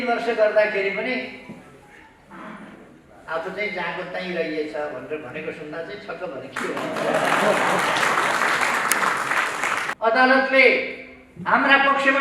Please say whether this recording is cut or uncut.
cut